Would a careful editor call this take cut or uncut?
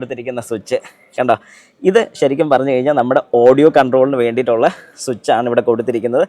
uncut